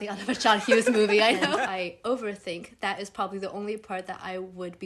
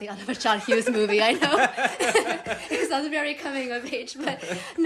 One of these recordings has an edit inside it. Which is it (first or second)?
first